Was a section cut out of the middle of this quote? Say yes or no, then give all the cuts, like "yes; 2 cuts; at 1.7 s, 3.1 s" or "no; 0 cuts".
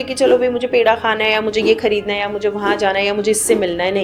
no; 0 cuts